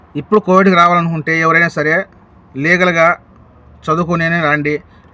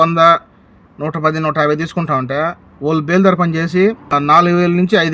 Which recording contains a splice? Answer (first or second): second